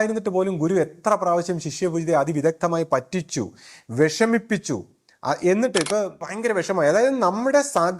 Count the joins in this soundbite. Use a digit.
1